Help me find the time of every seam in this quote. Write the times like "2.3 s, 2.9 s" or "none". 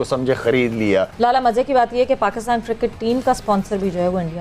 1.1 s